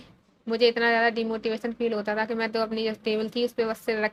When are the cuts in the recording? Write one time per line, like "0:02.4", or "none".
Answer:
none